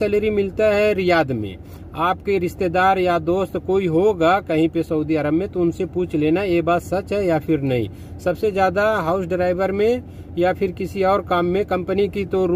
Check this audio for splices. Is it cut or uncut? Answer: uncut